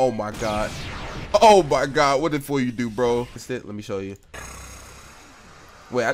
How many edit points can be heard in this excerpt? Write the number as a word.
one